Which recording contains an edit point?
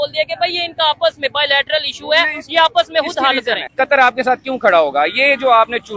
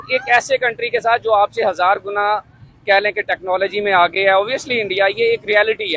first; 1 cut; at 3.7 s

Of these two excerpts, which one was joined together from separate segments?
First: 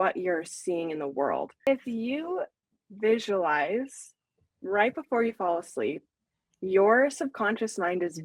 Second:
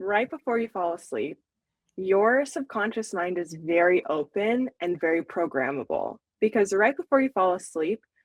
first; 1 cut; at 1.6 s

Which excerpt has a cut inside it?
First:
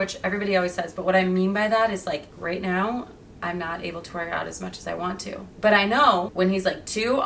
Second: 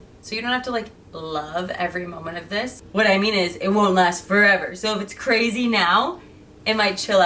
second; 1 cut; at 2.8 s

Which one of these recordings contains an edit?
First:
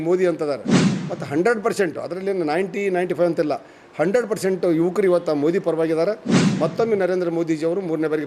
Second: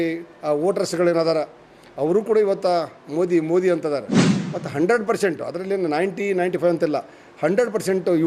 first; 1 cut; at 6.6 s

